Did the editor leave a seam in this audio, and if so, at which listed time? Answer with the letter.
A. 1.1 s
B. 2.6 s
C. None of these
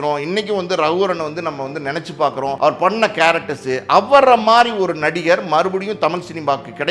B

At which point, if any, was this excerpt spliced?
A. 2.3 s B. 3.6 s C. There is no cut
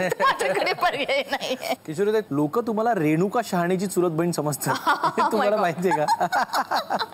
A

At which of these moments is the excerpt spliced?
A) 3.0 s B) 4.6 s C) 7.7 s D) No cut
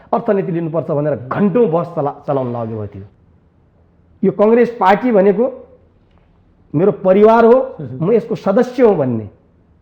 A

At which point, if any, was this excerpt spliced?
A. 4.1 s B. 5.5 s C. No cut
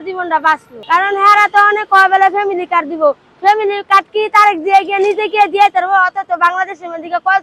C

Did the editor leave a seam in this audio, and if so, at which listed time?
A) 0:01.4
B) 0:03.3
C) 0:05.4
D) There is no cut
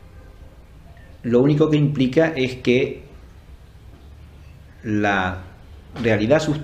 A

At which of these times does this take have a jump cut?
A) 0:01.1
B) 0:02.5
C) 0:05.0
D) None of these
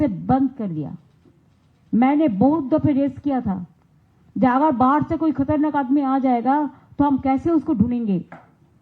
C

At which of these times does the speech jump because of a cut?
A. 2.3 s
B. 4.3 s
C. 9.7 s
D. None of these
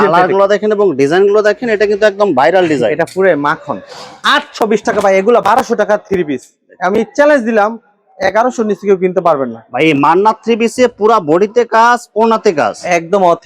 B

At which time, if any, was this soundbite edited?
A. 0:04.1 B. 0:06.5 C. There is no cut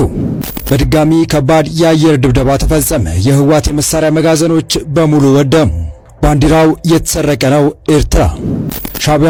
C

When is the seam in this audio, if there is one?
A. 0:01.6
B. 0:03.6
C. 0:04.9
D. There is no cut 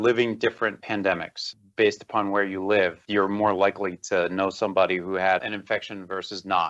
A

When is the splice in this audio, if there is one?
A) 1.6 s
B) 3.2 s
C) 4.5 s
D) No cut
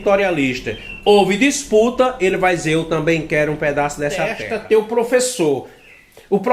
C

